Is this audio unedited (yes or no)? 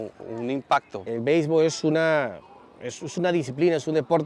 no